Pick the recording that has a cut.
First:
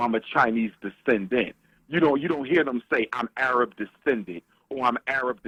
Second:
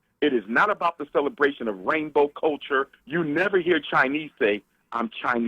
second; 1 cut; at 3.0 s

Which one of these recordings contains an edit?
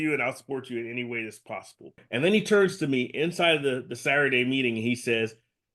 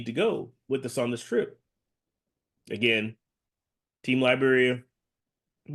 first; 1 cut; at 2.0 s

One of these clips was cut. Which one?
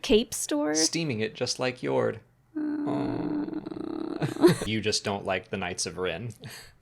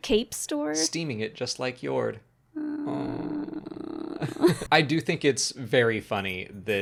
first; 1 cut; at 4.6 s

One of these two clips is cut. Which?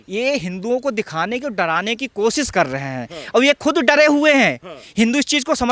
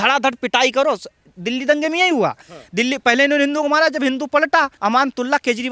second; 1 cut; at 4.7 s

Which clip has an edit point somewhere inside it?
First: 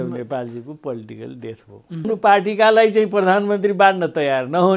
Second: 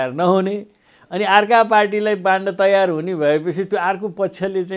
first; 1 cut; at 2.0 s

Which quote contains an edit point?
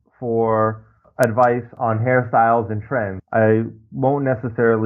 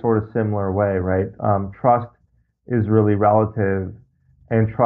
first; 3 cuts; at 1.0 s, 1.7 s, 3.2 s

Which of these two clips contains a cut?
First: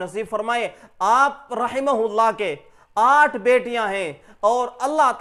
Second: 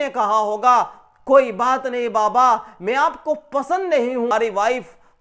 second; 1 cut; at 4.3 s

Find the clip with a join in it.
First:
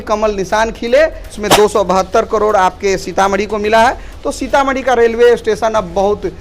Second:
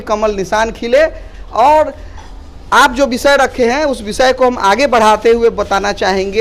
first; 1 cut; at 1.4 s

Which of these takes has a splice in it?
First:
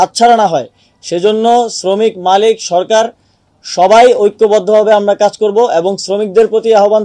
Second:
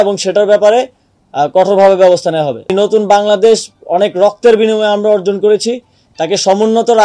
second; 1 cut; at 2.7 s

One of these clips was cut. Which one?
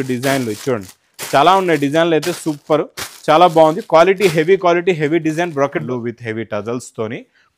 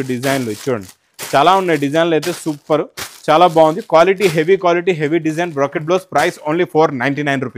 first; 1 cut; at 5.8 s

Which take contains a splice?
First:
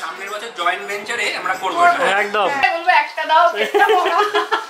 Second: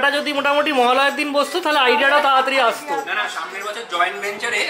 first; 1 cut; at 2.6 s

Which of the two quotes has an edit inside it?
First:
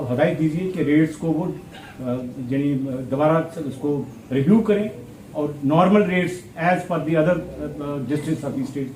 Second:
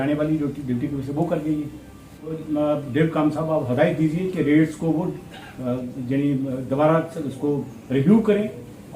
second; 1 cut; at 2.4 s

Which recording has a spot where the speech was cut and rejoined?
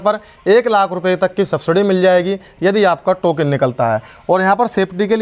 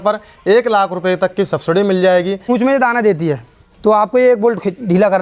second; 1 cut; at 2.4 s

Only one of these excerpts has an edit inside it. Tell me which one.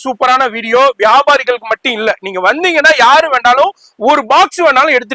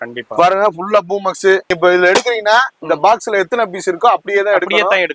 second; 1 cut; at 1.7 s

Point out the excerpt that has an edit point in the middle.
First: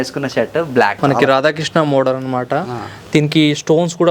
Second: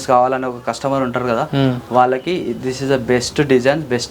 first; 1 cut; at 0.9 s

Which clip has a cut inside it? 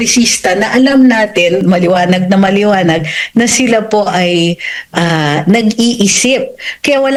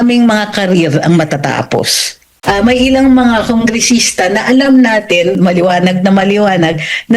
second; 1 cut; at 2.3 s

